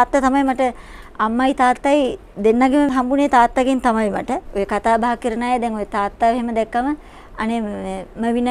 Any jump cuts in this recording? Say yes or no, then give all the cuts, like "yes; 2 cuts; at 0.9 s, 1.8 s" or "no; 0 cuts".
yes; 2 cuts; at 2.9 s, 4.4 s